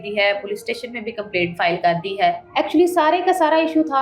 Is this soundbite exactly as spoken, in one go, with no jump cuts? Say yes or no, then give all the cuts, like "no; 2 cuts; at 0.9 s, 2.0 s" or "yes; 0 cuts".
no; 1 cut; at 2.4 s